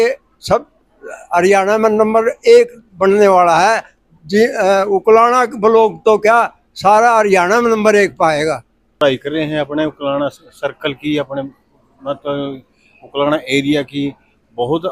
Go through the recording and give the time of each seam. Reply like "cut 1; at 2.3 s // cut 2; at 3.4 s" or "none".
cut 1; at 8.8 s

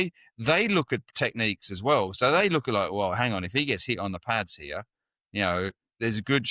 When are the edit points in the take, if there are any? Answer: none

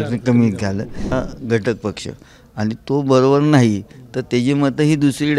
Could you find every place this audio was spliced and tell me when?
cut 1; at 1.1 s

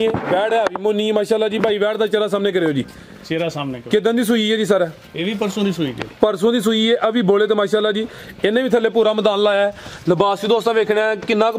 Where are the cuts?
none

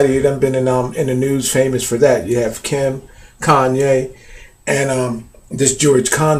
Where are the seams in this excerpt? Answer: cut 1; at 2.1 s

